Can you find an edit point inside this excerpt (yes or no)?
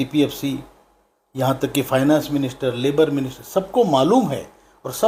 no